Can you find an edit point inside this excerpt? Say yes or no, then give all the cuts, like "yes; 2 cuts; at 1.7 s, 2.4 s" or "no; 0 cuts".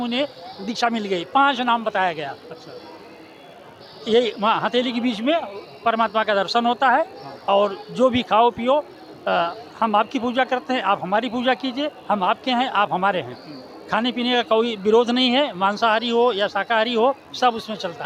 no; 0 cuts